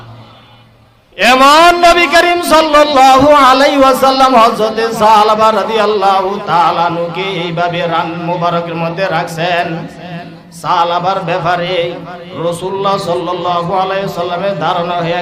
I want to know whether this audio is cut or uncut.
uncut